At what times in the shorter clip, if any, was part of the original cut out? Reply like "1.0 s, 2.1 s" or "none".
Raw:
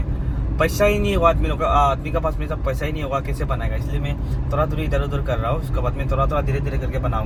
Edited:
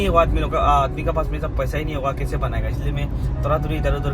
none